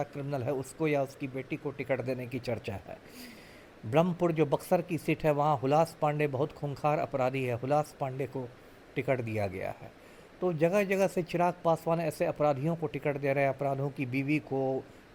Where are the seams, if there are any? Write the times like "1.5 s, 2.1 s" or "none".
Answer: none